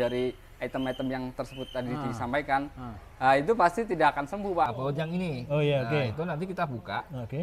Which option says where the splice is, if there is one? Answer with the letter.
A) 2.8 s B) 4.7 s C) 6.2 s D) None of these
B